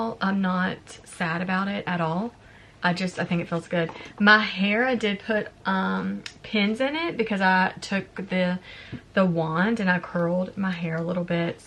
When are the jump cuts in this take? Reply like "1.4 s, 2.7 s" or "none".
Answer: none

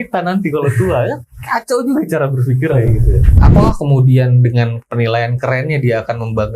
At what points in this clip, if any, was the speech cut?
3.4 s

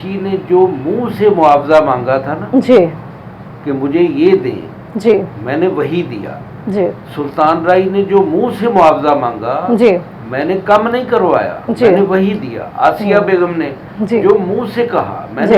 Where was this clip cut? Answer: none

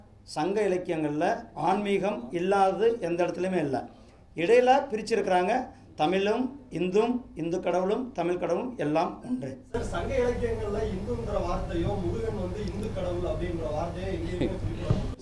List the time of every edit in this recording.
none

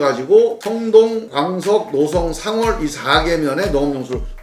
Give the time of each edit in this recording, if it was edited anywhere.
none

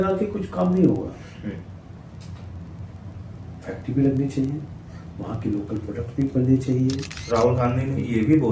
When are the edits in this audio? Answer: 7.1 s

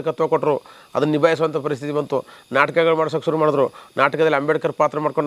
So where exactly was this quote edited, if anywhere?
none

